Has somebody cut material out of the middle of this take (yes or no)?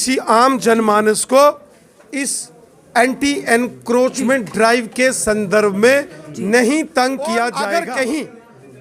yes